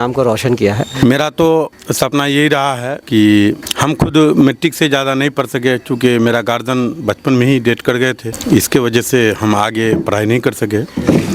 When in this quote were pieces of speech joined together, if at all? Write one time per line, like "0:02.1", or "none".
0:00.9
0:01.8
0:03.0
0:03.7
0:08.3